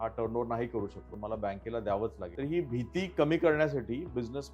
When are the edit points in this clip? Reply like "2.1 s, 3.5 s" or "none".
1.1 s, 2.2 s